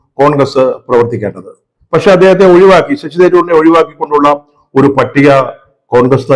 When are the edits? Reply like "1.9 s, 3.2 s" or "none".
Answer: none

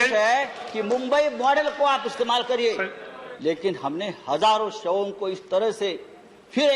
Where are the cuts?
3.2 s

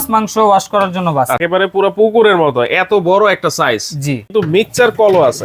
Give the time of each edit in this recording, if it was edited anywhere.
1.4 s, 4.3 s

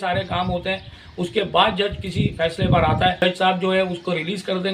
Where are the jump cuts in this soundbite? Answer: 3.2 s

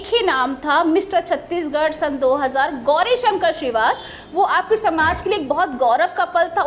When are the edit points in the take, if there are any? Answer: none

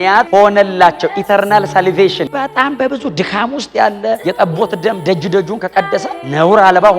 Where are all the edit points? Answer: 2.2 s

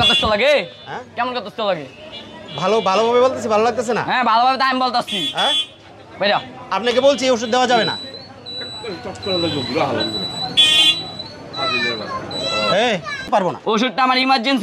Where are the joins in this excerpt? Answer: 13.2 s

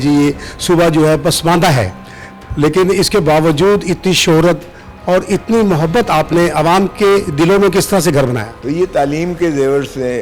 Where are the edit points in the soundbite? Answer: 8.5 s

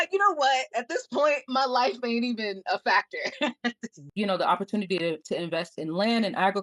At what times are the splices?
4.0 s

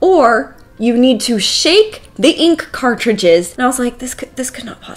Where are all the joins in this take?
3.5 s

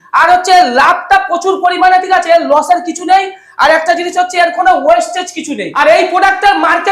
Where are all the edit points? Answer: 5.7 s

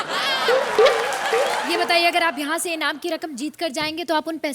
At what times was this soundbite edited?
1.6 s

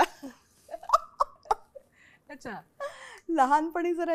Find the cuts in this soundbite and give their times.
none

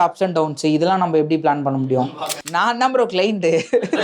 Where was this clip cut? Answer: 2.5 s

